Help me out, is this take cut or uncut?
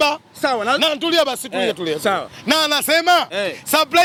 uncut